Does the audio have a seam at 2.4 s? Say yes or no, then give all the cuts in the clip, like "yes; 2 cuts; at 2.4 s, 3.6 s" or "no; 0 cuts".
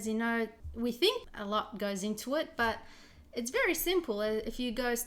no; 0 cuts